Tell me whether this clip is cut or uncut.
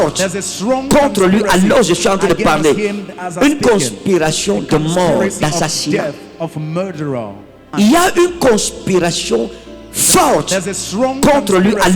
cut